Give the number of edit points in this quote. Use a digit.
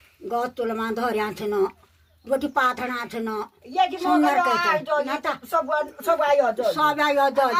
0